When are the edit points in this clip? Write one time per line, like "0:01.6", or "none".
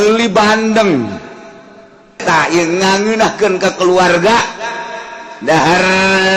0:02.2